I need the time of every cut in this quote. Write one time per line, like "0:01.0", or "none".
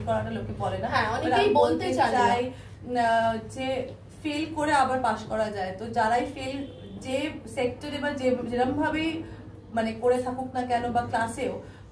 none